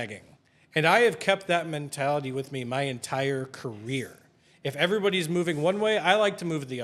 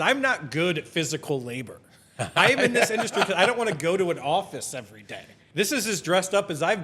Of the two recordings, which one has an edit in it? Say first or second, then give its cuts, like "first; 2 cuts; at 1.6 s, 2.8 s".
second; 1 cut; at 5.4 s